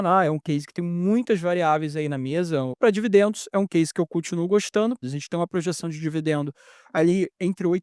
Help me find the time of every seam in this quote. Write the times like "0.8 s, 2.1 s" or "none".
2.7 s, 5.1 s